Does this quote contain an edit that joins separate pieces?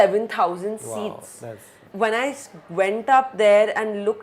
yes; 1 cut; at 1.8 s

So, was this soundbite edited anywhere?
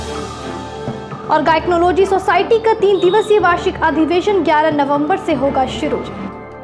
no; 0 cuts

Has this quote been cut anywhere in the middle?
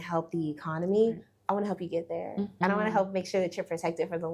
yes; 1 cut; at 2.5 s

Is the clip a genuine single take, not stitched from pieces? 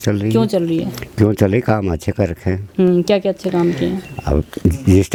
yes; 0 cuts

